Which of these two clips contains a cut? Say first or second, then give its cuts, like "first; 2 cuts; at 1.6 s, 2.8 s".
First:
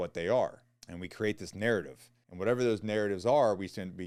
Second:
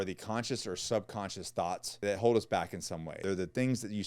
second; 1 cut; at 3.1 s